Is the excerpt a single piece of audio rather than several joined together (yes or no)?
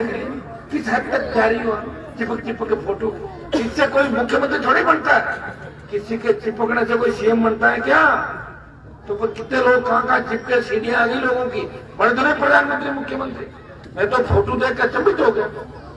yes